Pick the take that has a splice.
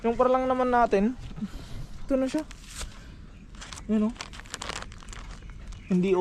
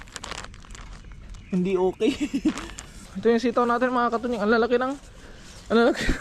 second; 1 cut; at 3.1 s

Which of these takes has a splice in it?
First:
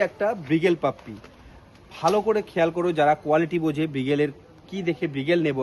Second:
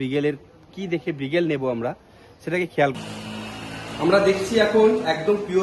second; 1 cut; at 2.9 s

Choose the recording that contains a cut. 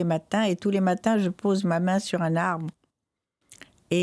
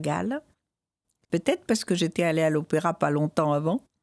second; 1 cut; at 1.1 s

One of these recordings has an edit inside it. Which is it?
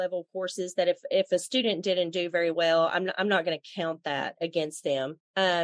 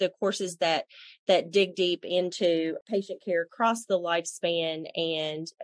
second; 1 cut; at 2.8 s

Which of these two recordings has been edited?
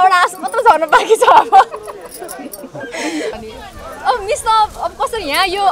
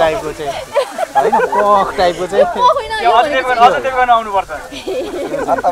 first; 1 cut; at 3.3 s

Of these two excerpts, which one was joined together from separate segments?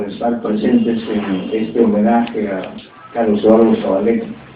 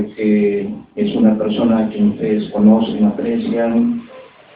second; 1 cut; at 3.5 s

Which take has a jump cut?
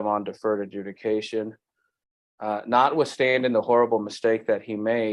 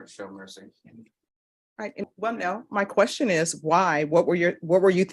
second; 1 cut; at 2.0 s

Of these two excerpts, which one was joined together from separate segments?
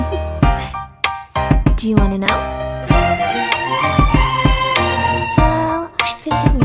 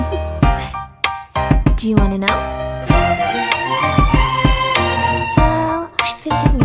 second; 2 cuts; at 2.3 s, 5.3 s

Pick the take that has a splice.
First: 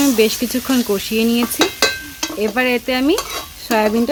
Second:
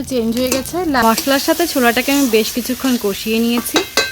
second; 1 cut; at 1.0 s

